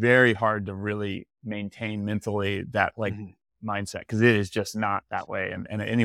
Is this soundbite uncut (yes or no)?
yes